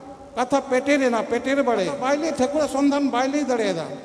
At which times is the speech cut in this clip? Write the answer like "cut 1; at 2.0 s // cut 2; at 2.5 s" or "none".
cut 1; at 2.0 s